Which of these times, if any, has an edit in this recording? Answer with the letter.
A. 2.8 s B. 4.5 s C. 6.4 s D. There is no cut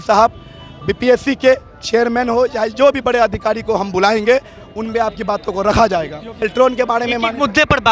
C